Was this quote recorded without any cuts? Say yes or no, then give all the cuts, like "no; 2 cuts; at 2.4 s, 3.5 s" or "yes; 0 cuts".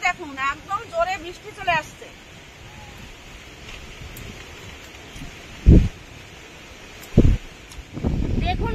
yes; 0 cuts